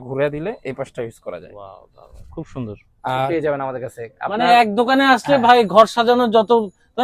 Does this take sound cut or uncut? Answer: cut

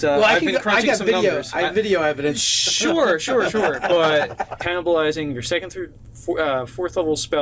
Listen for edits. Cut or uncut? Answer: uncut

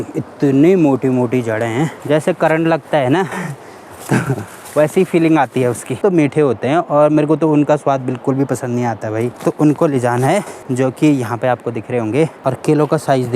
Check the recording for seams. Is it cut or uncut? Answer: cut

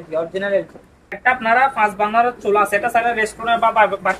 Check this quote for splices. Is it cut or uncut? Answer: cut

